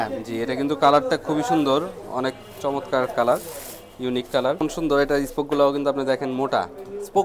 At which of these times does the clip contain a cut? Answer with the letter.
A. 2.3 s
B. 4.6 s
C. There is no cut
B